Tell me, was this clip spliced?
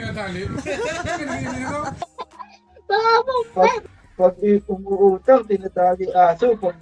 yes; 2 cuts; at 1.9 s, 3.5 s

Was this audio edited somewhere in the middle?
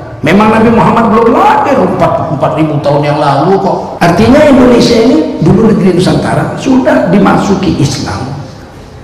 yes; 1 cut; at 3.9 s

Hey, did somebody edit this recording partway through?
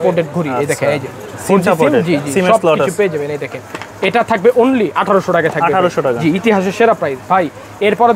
no; 0 cuts

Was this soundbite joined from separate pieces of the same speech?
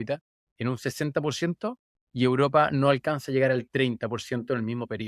no; 0 cuts

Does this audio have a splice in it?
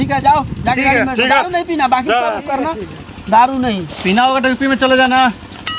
no; 0 cuts

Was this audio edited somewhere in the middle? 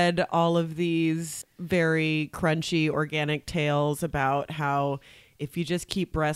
yes; 1 cut; at 1.4 s

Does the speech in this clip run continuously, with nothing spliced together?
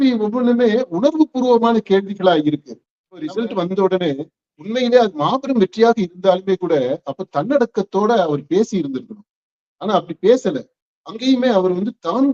no; 1 cut; at 3.3 s

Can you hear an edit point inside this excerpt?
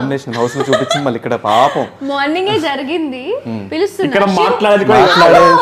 no; 0 cuts

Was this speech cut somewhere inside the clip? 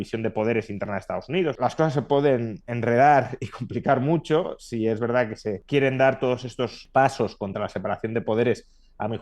yes; 3 cuts; at 1.6 s, 5.6 s, 6.8 s

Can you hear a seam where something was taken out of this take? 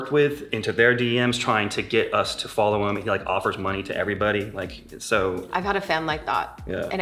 no; 0 cuts

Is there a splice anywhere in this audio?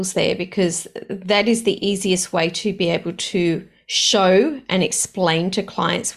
no; 0 cuts

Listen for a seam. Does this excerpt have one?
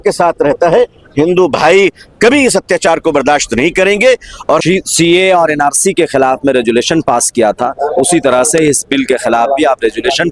yes; 1 cut; at 4.6 s

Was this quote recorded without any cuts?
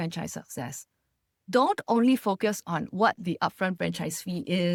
yes; 0 cuts

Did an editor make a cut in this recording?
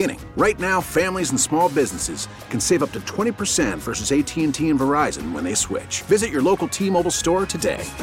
no; 0 cuts

